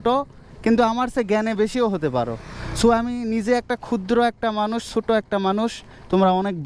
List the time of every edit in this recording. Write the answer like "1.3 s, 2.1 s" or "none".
none

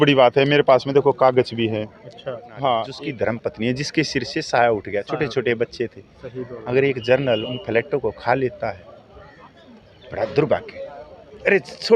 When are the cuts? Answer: 3.0 s

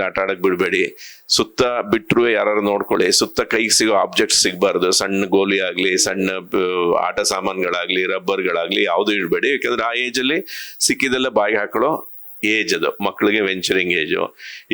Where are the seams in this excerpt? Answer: none

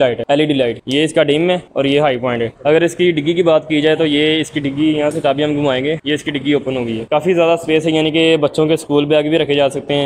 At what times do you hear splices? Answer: 2.5 s

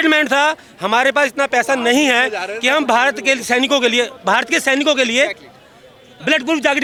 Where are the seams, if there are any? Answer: none

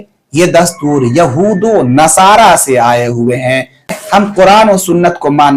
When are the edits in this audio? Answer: 3.9 s

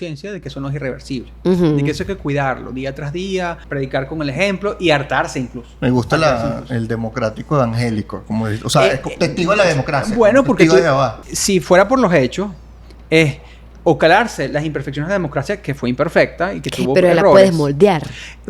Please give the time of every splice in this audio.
3.6 s, 11.2 s

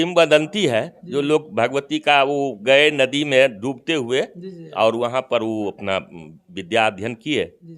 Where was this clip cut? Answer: none

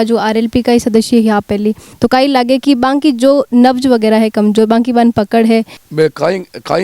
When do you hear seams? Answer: 1.9 s, 5.8 s

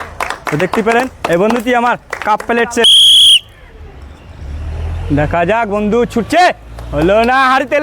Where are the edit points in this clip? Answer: 2.8 s

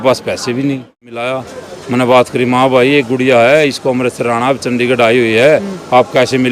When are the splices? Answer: 1.2 s

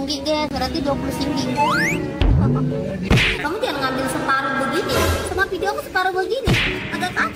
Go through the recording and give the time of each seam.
3.4 s

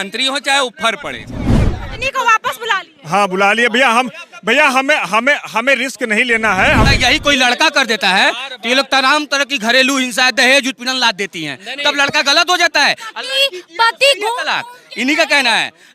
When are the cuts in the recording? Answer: 1.8 s, 6.8 s

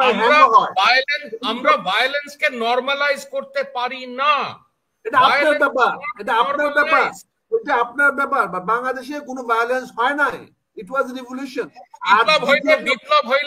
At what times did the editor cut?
11.8 s

